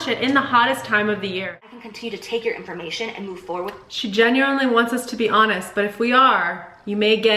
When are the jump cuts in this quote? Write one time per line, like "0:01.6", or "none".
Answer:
0:01.7